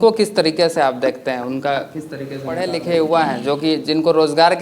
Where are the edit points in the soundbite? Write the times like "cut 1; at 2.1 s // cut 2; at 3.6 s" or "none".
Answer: cut 1; at 2.6 s